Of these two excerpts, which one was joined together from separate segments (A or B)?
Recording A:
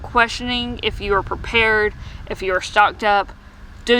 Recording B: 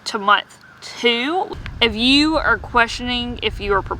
B